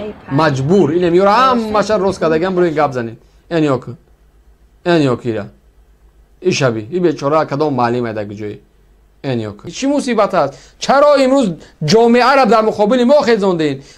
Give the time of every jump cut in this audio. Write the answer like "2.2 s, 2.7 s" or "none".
9.6 s